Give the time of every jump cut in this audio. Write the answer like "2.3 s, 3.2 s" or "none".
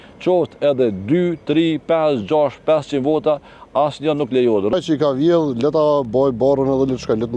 4.7 s